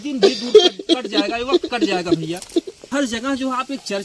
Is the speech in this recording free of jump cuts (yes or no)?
no